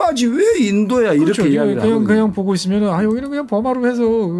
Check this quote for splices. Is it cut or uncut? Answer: uncut